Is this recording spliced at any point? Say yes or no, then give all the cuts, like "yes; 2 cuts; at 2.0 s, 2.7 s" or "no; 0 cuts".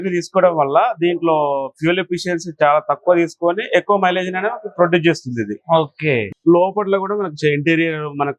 yes; 1 cut; at 6.3 s